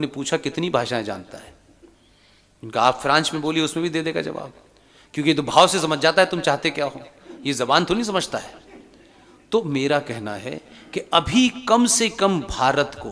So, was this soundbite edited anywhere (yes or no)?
no